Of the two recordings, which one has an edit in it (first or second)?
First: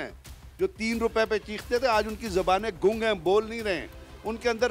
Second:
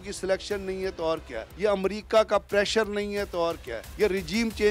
second